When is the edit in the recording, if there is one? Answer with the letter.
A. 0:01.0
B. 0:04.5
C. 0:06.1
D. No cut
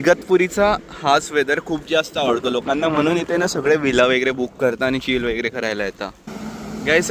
C